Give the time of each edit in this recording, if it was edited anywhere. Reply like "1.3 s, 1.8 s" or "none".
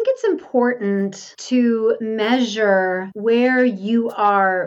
1.3 s, 2.0 s, 3.1 s